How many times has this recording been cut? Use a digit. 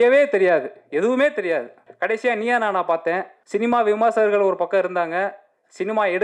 2